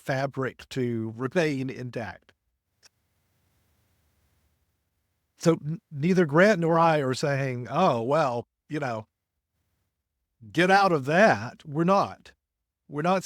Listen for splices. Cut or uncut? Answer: uncut